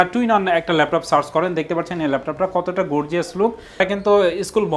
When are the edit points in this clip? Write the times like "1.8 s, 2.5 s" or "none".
3.8 s